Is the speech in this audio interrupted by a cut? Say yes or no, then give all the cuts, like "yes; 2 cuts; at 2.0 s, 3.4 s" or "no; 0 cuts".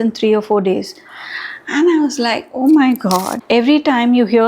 yes; 1 cut; at 3.3 s